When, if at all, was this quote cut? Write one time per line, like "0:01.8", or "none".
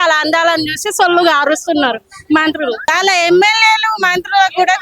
0:02.9